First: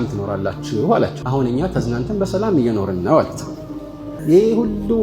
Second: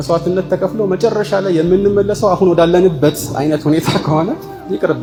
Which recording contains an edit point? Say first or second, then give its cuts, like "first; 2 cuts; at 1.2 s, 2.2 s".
first; 2 cuts; at 1.2 s, 4.1 s